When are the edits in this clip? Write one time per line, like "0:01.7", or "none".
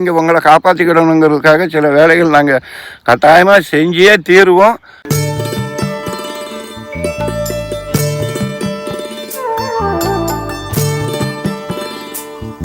0:05.0